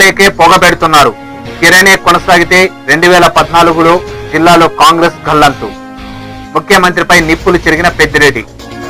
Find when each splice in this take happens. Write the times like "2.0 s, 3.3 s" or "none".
none